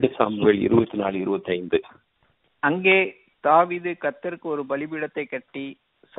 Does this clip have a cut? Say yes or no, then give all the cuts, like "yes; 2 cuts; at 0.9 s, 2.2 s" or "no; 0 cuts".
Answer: no; 0 cuts